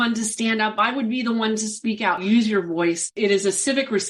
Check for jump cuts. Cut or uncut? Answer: cut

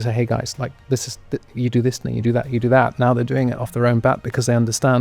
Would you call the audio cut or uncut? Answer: uncut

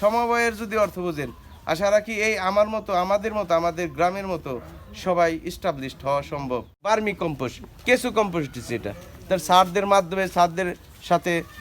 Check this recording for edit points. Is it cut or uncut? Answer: cut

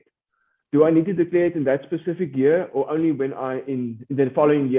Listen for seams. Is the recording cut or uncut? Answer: uncut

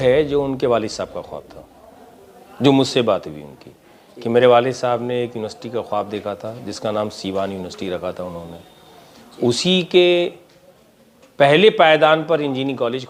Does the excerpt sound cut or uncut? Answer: uncut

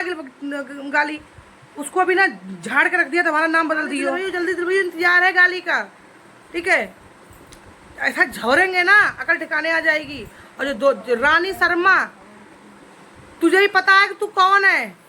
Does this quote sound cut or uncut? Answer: cut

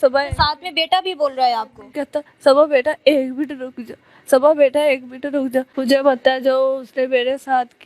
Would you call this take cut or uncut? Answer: cut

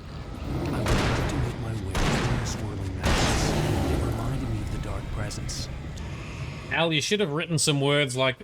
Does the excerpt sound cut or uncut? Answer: cut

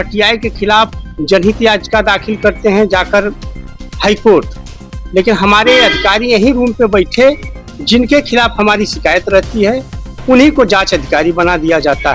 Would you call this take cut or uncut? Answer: uncut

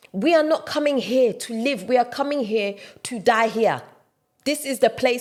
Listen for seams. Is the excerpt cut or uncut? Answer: uncut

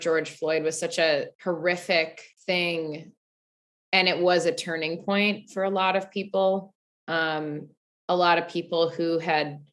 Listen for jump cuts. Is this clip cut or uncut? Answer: cut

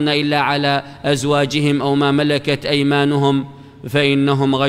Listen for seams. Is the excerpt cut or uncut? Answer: cut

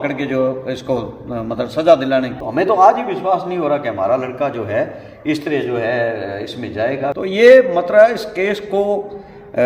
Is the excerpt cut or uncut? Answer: cut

